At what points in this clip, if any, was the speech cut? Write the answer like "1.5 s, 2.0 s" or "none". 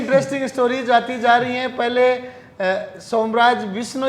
none

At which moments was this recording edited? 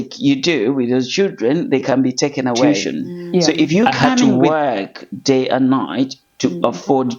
4.2 s

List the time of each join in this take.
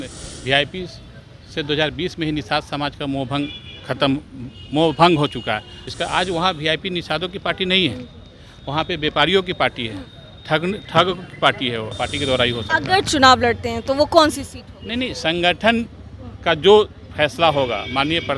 5.7 s, 11.9 s

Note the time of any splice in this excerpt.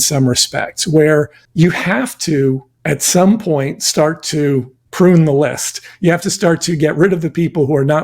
1.4 s, 2.7 s, 4.8 s

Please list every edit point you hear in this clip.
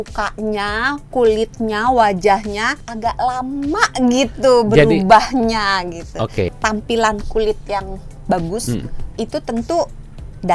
6.5 s

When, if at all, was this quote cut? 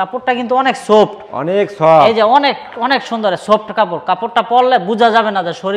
none

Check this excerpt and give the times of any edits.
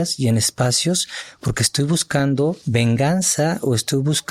2.6 s

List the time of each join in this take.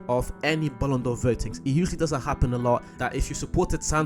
2.9 s

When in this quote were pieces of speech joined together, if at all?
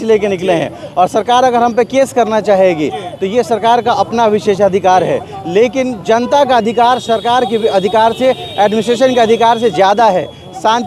none

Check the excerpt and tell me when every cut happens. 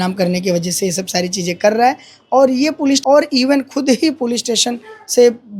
3.0 s

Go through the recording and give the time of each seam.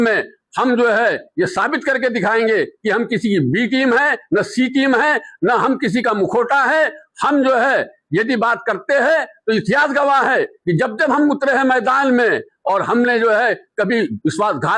none

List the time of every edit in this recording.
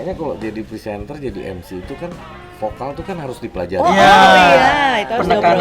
none

